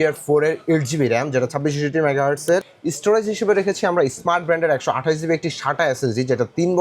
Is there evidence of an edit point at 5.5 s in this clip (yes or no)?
no